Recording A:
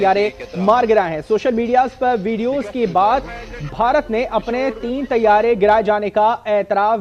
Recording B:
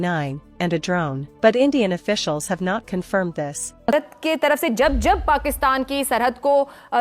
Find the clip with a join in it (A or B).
B